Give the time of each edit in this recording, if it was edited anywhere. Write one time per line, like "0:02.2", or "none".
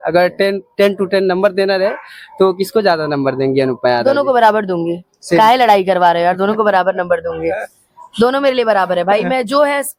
none